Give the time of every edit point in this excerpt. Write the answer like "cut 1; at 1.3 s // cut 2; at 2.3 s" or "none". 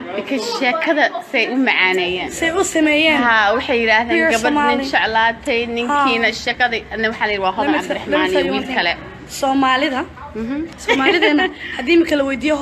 cut 1; at 4.7 s